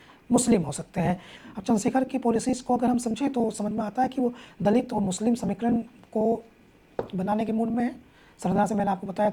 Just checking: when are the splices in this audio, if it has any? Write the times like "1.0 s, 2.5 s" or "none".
1.3 s